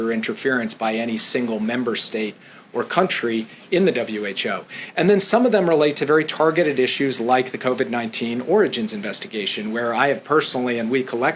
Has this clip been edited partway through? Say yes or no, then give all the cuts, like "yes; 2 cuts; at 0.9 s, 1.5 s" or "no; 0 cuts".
no; 0 cuts